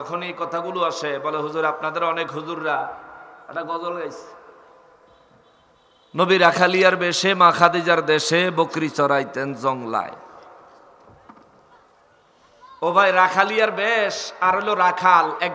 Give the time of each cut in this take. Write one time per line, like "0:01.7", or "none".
none